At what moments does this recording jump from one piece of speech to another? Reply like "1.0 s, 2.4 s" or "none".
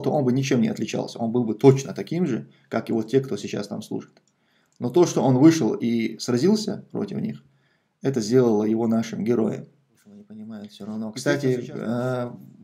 10.3 s